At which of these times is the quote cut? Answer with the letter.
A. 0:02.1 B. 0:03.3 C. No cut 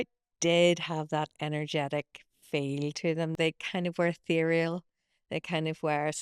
B